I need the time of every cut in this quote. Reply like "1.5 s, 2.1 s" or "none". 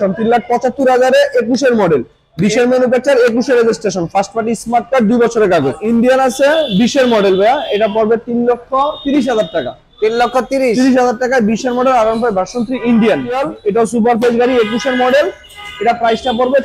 5.7 s, 13.4 s